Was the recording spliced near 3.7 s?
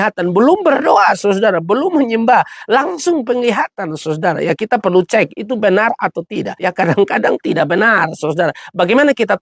no; 1 cut; at 6.5 s

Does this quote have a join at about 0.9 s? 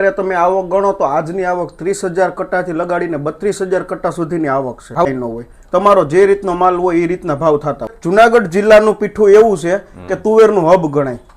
no; 2 cuts; at 5.1 s, 8.0 s

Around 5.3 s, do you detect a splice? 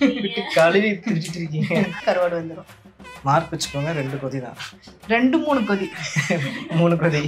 no; 1 cut; at 2.0 s

